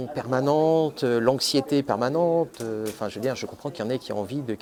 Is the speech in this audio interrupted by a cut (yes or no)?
no